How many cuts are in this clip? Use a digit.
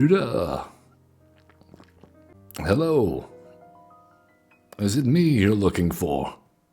1